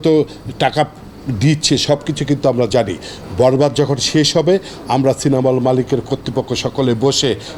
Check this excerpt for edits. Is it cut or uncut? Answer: uncut